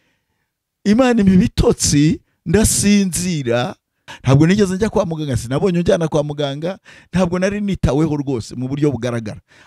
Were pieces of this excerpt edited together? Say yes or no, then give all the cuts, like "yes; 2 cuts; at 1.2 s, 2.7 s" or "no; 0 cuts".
yes; 1 cut; at 4.1 s